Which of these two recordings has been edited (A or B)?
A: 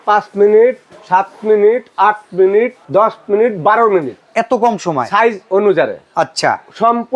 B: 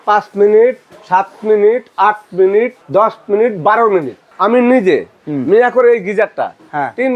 B